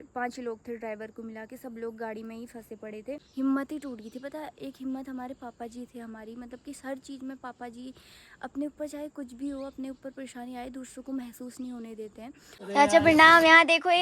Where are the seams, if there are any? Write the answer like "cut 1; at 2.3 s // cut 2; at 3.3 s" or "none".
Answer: cut 1; at 3.3 s // cut 2; at 12.5 s